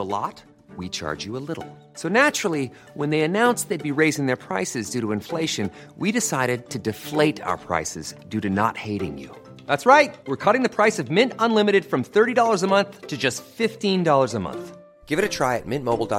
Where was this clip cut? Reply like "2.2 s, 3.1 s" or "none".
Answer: none